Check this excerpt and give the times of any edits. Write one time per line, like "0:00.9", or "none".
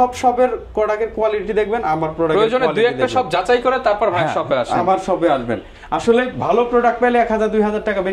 none